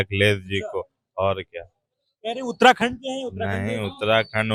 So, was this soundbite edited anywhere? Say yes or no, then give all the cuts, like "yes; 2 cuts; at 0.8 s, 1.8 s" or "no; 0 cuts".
no; 0 cuts